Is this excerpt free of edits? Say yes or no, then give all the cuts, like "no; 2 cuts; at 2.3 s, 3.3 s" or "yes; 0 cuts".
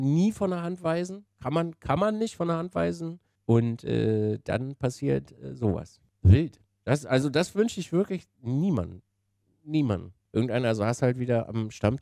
no; 1 cut; at 10.2 s